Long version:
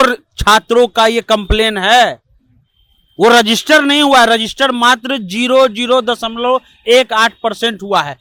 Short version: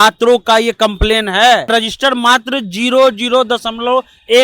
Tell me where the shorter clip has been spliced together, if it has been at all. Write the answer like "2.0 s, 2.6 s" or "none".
1.7 s